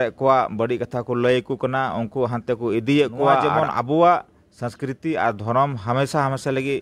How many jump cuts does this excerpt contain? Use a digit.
1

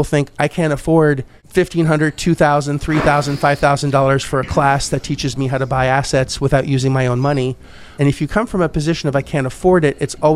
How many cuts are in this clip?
2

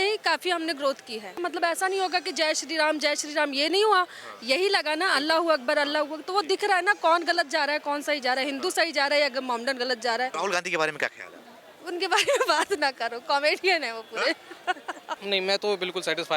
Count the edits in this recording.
3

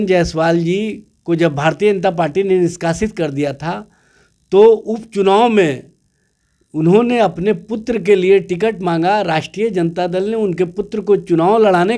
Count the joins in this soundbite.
0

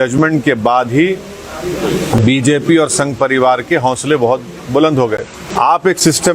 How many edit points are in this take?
1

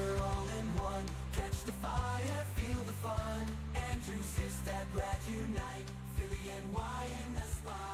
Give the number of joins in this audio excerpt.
0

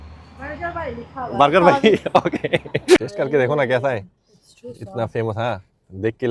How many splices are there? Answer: 1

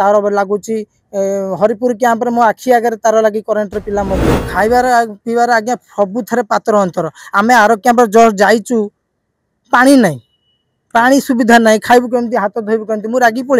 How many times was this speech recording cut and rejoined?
1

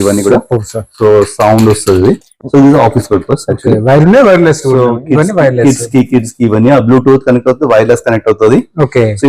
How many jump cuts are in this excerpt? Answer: 0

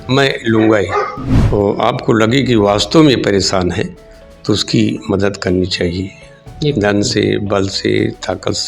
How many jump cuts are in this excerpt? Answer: 1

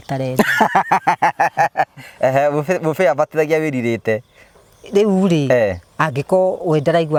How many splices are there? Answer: 0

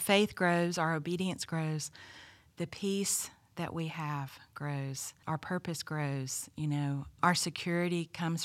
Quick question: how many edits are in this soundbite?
2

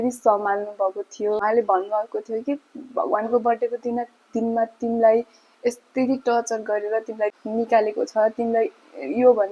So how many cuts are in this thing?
2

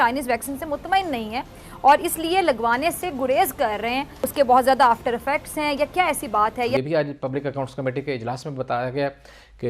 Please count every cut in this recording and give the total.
2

